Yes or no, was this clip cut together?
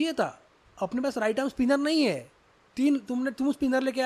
no